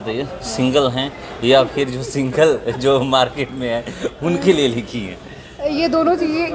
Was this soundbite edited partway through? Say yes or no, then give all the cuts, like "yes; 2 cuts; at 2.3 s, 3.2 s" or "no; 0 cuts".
no; 0 cuts